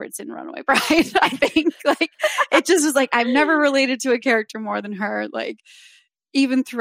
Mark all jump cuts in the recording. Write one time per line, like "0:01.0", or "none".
none